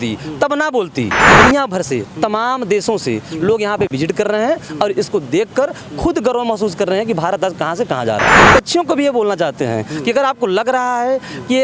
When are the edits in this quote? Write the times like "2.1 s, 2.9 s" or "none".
1.3 s, 8.3 s